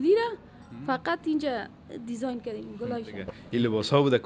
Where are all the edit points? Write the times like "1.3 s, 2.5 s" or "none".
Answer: 3.4 s